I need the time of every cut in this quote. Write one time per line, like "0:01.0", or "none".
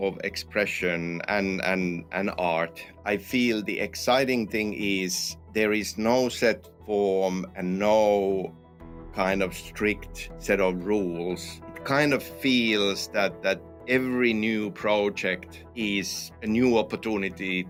none